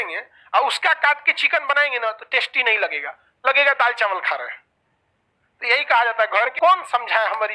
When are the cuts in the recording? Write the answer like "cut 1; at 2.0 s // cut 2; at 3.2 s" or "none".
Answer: cut 1; at 6.5 s